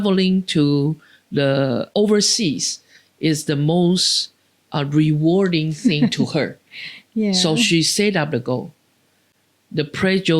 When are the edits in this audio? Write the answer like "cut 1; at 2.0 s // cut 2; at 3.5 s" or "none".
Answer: cut 1; at 1.9 s